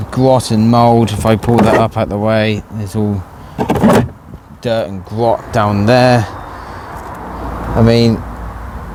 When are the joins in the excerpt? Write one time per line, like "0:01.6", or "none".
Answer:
none